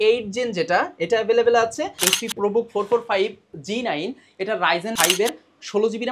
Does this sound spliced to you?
yes; 2 cuts; at 2.0 s, 4.9 s

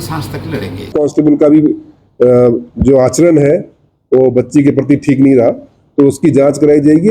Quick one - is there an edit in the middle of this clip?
yes; 1 cut; at 0.9 s

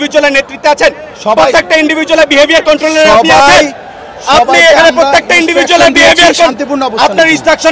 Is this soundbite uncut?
yes; 0 cuts

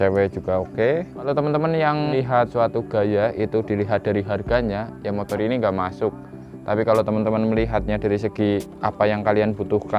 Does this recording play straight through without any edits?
no; 2 cuts; at 1.3 s, 2.3 s

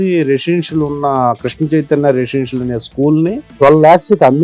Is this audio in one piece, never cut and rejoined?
no; 1 cut; at 3.4 s

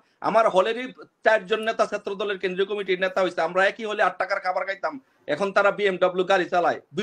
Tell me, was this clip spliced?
no; 0 cuts

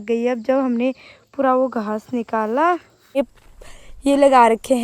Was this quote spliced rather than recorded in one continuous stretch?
yes; 1 cut; at 3.2 s

